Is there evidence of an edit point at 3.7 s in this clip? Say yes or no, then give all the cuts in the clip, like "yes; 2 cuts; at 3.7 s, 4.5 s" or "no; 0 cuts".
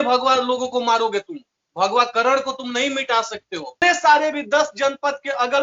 yes; 1 cut; at 3.7 s